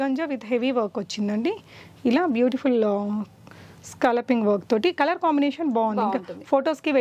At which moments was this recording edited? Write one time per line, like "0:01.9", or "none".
none